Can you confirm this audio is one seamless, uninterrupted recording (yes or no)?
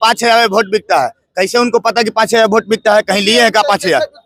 yes